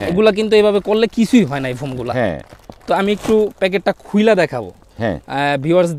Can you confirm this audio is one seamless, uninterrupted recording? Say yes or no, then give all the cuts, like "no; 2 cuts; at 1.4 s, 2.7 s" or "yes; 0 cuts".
yes; 0 cuts